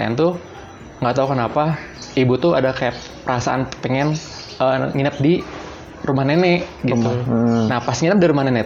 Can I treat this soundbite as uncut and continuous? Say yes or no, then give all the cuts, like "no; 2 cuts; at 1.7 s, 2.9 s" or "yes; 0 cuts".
yes; 0 cuts